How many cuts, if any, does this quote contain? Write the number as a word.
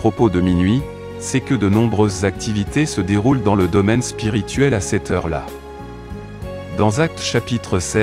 two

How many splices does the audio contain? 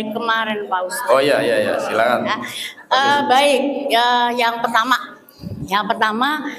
zero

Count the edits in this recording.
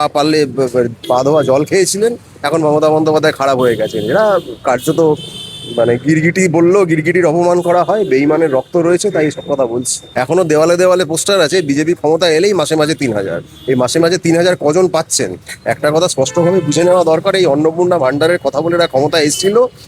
one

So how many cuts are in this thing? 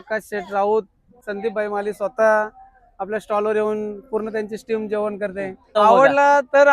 two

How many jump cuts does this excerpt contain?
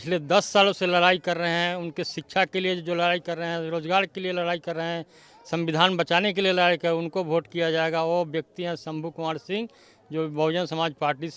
zero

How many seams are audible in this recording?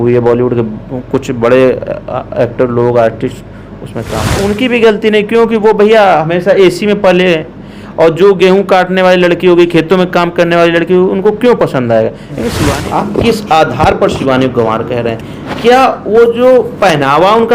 two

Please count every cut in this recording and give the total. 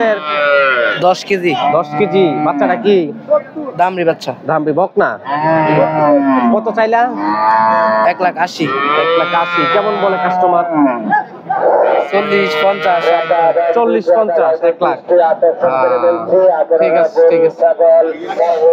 zero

